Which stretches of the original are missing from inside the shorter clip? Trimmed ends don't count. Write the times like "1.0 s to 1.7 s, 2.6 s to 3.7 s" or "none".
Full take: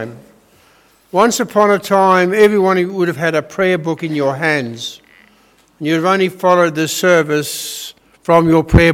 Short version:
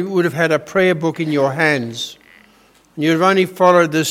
none